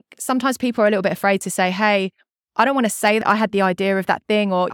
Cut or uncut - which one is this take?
cut